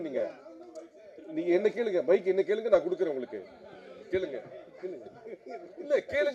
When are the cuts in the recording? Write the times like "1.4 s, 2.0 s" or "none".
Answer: none